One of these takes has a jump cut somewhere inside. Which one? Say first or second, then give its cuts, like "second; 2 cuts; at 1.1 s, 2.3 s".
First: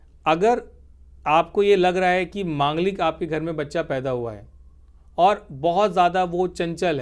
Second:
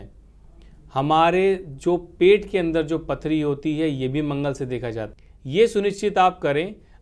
second; 1 cut; at 5.1 s